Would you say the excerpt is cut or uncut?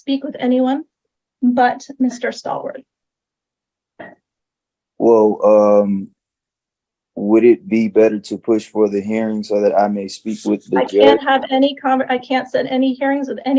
uncut